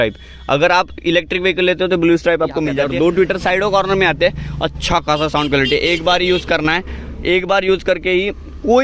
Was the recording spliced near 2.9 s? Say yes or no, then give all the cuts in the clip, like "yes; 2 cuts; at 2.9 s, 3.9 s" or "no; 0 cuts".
yes; 1 cut; at 2.9 s